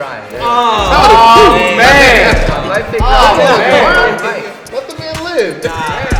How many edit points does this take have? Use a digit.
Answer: 0